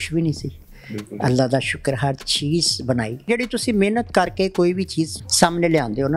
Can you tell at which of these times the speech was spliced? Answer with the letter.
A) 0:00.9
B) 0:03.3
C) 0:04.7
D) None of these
B